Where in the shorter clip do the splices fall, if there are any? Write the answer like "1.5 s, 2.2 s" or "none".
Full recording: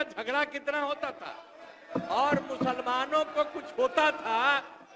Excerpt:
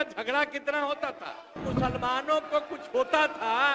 1.6 s